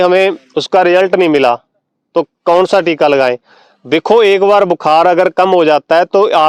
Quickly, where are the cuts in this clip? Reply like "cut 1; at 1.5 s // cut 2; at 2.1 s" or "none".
none